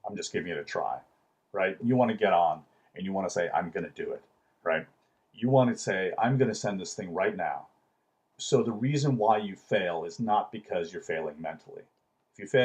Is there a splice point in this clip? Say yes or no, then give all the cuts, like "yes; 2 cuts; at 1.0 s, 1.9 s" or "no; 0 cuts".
yes; 2 cuts; at 1.8 s, 8.3 s